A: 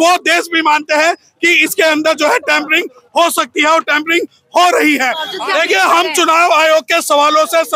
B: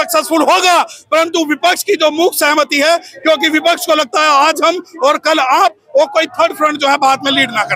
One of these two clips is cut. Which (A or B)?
A